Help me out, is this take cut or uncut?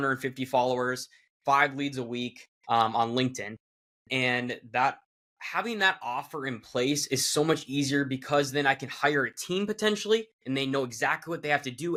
uncut